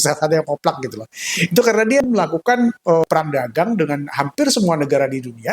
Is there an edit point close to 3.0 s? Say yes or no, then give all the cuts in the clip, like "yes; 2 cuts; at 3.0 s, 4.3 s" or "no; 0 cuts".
yes; 2 cuts; at 2.0 s, 3.0 s